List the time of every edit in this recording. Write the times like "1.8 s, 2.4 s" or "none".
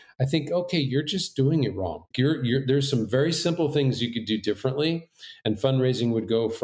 none